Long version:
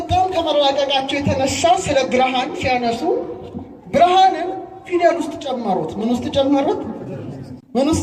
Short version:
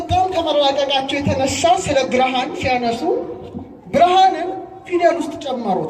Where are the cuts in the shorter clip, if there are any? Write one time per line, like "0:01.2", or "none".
none